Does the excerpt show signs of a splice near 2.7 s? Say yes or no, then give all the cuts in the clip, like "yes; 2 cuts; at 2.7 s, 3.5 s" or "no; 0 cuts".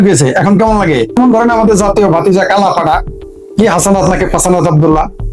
no; 1 cut; at 1.2 s